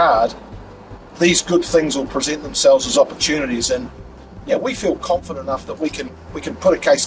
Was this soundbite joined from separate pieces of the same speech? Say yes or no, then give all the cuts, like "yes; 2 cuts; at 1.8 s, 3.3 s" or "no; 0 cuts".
no; 0 cuts